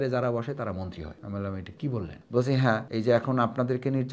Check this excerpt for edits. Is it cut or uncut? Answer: cut